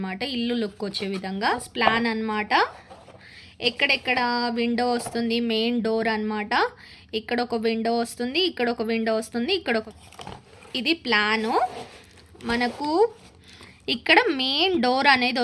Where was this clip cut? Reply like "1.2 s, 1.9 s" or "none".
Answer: 1.7 s, 9.9 s